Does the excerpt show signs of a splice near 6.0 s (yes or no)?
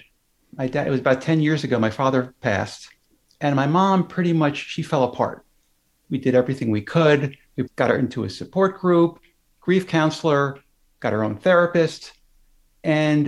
yes